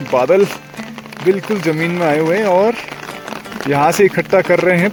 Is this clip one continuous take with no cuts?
yes; 0 cuts

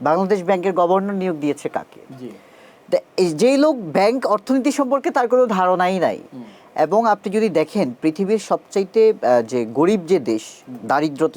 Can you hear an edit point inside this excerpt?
no; 0 cuts

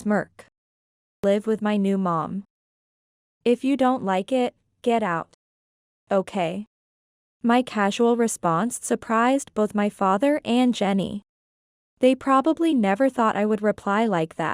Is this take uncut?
no; 1 cut; at 1.2 s

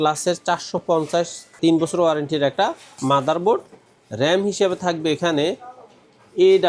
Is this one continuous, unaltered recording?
yes; 0 cuts

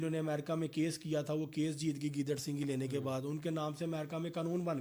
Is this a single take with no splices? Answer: yes; 0 cuts

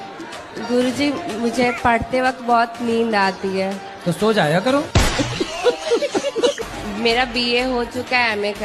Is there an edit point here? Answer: no; 0 cuts

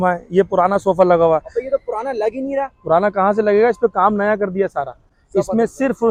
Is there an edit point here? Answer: no; 0 cuts

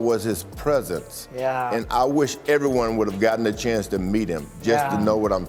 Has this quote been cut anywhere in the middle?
no; 0 cuts

